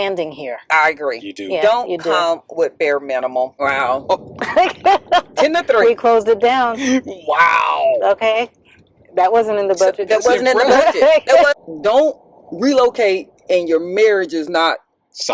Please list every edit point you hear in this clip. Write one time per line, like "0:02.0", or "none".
0:03.5
0:11.5